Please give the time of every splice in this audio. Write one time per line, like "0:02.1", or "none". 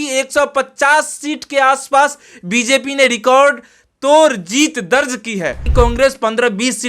0:05.7